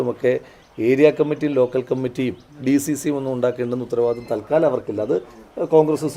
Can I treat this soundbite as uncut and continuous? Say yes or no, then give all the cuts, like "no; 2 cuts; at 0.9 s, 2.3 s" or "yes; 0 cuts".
yes; 0 cuts